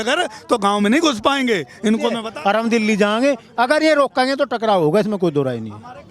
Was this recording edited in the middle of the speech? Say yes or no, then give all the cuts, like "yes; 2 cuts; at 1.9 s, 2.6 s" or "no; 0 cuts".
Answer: yes; 1 cut; at 2.3 s